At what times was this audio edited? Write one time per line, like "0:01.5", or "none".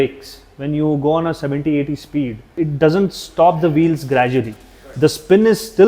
0:02.4